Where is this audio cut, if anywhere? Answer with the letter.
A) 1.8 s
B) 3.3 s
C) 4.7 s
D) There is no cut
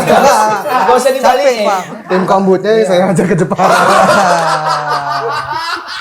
A